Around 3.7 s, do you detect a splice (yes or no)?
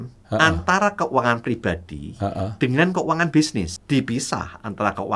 yes